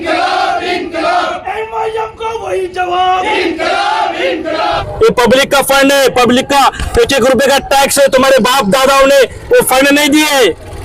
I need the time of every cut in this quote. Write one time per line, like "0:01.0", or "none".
0:04.9